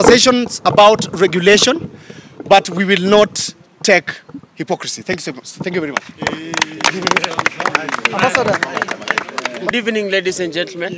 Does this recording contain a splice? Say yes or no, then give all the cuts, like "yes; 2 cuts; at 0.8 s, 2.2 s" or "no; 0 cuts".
no; 0 cuts